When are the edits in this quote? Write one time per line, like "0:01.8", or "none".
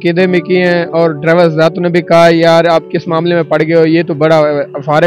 none